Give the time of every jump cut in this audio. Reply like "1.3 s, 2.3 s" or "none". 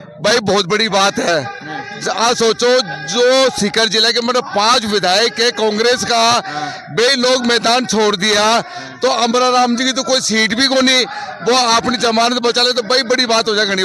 none

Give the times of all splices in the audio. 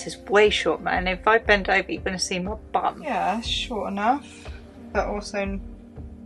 3.0 s

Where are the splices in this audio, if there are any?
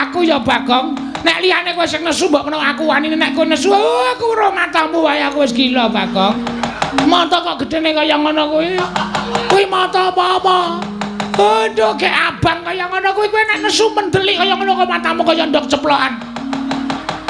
none

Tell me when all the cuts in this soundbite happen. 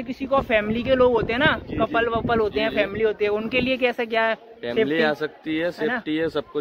none

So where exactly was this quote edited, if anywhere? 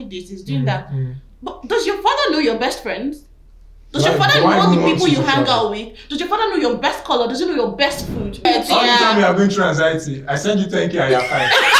8.4 s

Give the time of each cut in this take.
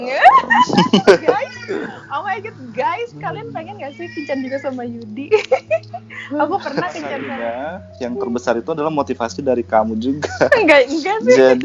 7.2 s

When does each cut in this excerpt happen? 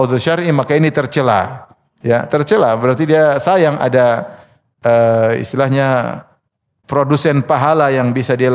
none

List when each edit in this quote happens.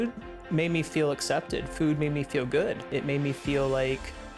2.9 s

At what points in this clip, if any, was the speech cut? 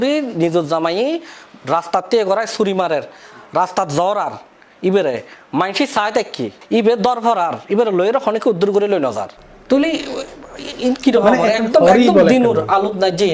none

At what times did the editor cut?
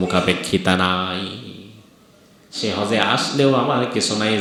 none

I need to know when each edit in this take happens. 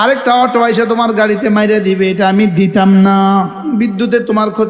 3.6 s

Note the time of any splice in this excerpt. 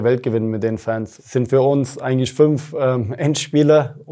1.1 s

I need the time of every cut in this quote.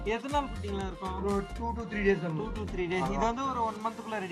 none

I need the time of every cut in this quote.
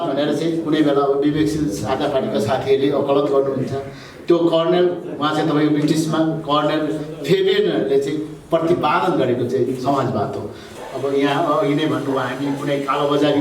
10.7 s

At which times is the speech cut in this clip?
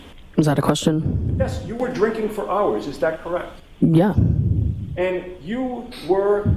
none

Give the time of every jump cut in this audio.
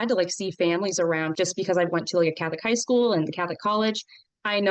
1.3 s

